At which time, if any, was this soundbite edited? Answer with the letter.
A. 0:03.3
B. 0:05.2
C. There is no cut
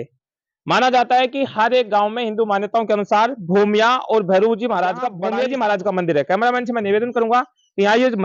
B